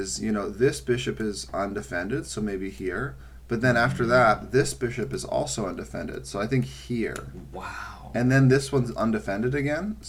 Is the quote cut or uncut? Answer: uncut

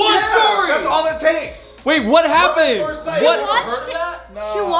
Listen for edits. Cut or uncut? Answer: uncut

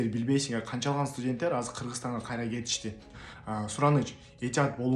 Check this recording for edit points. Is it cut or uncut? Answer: cut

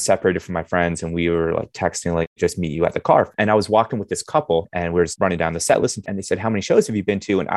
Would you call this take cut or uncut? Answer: cut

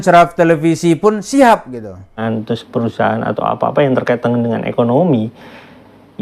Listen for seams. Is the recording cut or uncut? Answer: cut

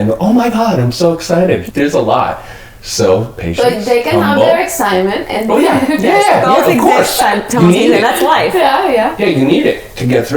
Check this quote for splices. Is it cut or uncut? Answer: cut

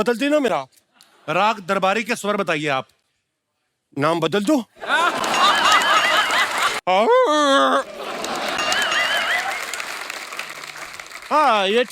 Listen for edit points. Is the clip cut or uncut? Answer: cut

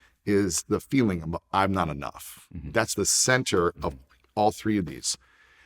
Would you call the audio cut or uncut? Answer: cut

